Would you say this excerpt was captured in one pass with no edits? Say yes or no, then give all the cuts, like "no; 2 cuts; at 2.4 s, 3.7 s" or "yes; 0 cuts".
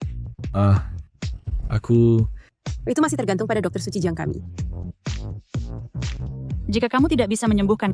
yes; 0 cuts